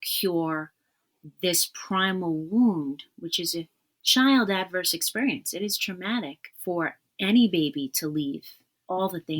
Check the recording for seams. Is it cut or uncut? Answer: cut